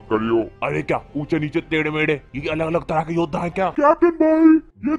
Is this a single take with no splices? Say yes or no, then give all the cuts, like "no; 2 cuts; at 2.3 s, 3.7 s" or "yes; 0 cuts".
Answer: no; 1 cut; at 3.7 s